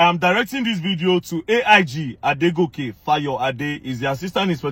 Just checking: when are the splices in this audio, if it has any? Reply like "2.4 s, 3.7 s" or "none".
none